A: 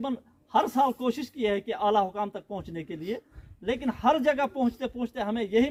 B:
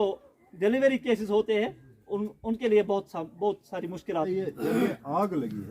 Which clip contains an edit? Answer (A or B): B